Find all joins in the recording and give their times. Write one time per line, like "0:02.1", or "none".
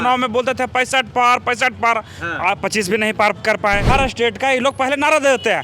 0:03.9